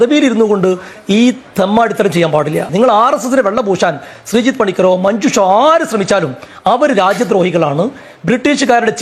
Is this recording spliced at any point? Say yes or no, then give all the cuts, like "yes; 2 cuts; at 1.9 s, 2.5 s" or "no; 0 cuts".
no; 0 cuts